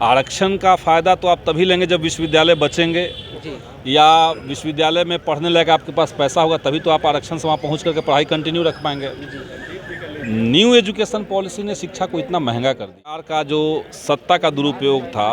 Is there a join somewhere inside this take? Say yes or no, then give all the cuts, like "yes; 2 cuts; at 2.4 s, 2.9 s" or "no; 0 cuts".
yes; 1 cut; at 13.3 s